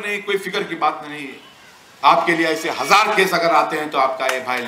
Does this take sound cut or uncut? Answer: uncut